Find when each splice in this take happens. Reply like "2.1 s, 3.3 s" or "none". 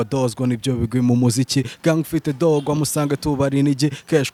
none